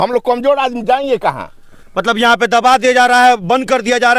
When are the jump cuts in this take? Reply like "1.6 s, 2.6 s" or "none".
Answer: none